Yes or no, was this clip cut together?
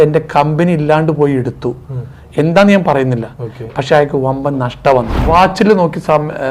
yes